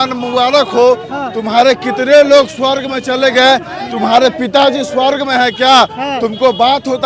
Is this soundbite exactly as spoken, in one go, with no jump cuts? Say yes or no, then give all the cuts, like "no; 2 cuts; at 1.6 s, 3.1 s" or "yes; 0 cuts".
yes; 0 cuts